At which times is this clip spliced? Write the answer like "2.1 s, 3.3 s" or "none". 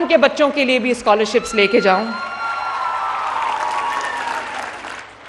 none

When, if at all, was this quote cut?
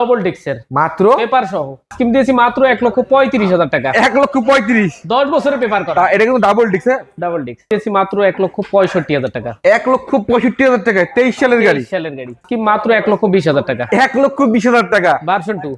1.9 s, 7.6 s, 12.5 s

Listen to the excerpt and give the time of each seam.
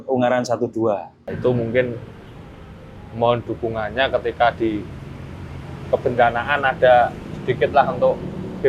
1.3 s

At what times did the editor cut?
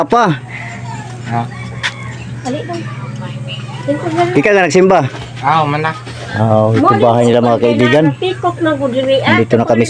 none

